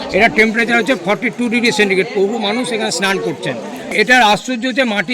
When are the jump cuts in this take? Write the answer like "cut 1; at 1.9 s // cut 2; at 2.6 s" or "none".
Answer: cut 1; at 3.9 s